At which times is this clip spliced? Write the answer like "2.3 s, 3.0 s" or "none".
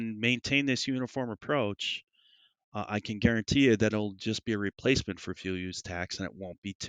none